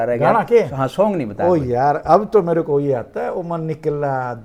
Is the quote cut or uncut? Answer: uncut